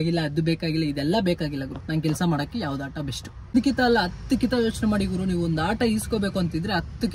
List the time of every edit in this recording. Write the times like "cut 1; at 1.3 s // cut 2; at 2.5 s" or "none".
cut 1; at 3.5 s